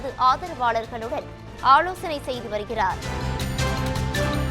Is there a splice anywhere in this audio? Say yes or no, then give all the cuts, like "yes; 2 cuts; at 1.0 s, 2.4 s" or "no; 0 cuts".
yes; 1 cut; at 3.0 s